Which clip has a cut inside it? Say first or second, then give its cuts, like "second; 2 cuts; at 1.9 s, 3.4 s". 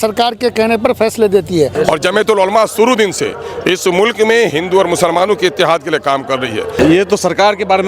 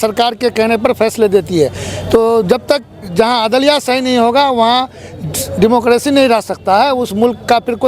first; 2 cuts; at 1.7 s, 6.8 s